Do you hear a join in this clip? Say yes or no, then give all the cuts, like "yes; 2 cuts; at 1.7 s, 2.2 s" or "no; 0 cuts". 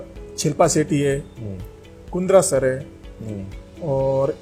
no; 0 cuts